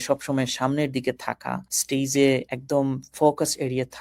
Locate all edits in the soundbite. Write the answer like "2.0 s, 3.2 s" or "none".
1.7 s, 2.5 s